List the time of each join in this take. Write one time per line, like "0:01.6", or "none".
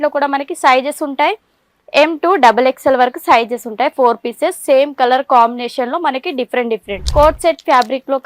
0:07.0